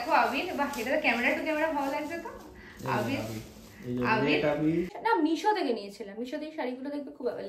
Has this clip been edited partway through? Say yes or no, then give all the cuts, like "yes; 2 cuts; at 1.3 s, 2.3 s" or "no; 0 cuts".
yes; 1 cut; at 4.9 s